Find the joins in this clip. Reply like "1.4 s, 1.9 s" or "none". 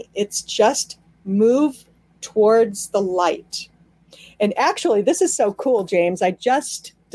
none